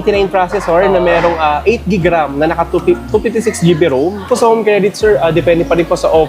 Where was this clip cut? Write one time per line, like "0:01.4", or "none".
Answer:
0:04.2